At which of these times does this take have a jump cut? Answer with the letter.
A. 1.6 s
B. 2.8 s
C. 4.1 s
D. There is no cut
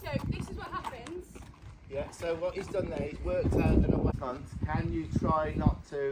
C